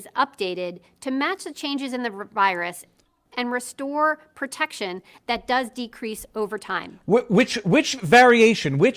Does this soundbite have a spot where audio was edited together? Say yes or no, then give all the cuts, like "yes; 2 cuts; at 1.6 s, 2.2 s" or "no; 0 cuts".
no; 0 cuts